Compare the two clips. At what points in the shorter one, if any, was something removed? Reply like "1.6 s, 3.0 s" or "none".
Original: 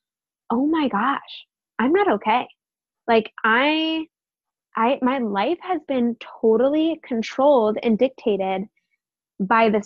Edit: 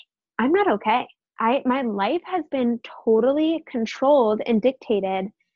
1.2 s